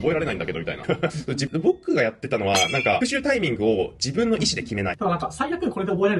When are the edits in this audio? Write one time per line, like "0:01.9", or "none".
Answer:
0:01.4
0:05.0